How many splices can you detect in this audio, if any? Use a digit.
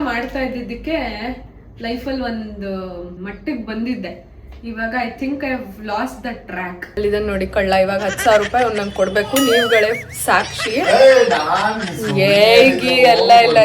2